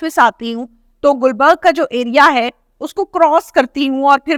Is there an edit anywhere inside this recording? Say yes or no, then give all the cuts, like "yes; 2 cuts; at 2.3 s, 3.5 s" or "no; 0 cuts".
no; 0 cuts